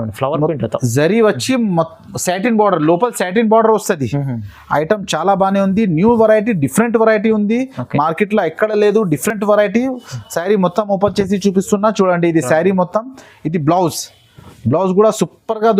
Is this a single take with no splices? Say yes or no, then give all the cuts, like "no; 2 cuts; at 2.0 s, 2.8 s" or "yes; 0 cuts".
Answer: yes; 0 cuts